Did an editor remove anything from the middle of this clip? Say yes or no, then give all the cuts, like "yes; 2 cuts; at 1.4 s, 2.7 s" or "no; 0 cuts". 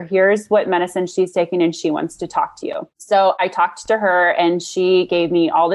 yes; 1 cut; at 2.9 s